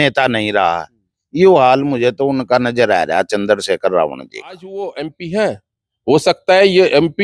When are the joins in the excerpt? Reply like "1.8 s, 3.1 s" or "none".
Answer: 4.7 s